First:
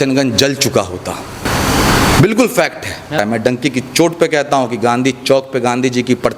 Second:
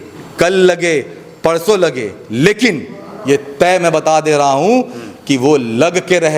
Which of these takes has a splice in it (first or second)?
first